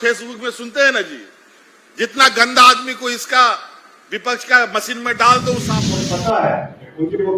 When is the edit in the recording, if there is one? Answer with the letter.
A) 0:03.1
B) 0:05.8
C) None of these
B